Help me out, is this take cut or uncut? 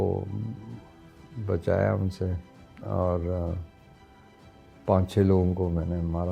uncut